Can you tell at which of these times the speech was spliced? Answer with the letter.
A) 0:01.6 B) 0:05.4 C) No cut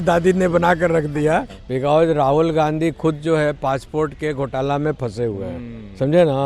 A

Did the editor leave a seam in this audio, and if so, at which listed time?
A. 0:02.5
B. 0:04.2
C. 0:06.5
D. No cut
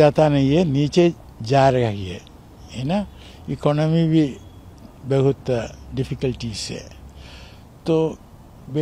D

